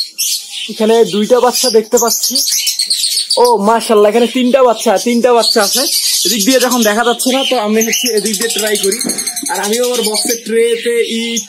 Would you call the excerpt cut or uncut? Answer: uncut